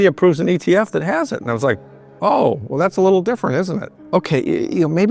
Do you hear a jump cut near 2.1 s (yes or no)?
yes